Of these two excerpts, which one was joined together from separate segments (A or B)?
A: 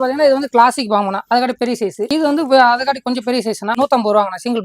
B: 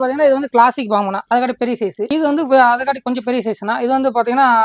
A